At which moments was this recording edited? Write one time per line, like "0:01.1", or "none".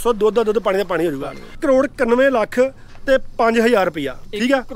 0:01.6